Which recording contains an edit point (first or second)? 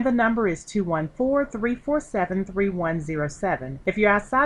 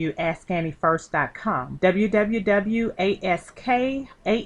second